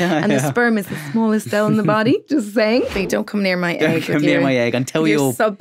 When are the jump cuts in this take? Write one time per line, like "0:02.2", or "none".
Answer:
0:03.1